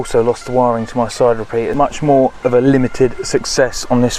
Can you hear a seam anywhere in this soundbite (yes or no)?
yes